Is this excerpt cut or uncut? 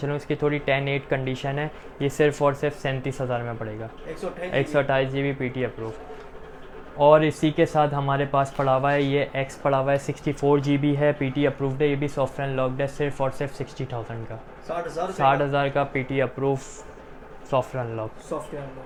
uncut